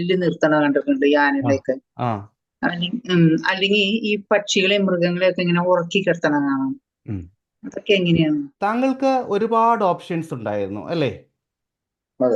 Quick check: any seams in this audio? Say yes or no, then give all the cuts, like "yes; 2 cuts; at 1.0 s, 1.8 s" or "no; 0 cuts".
yes; 1 cut; at 8.5 s